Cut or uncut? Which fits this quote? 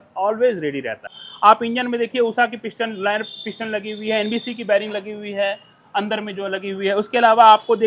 cut